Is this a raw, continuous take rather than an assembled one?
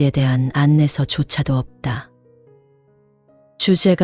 yes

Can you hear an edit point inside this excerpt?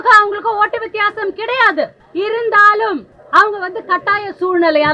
yes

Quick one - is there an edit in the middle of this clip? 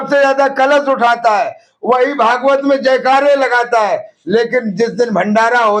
no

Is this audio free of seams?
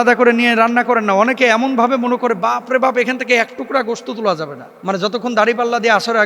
no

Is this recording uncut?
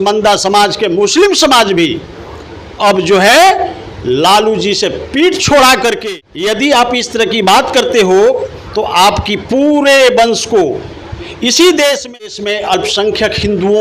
no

